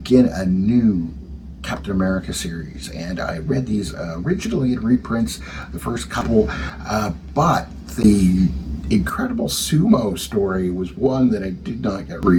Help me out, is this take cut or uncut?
uncut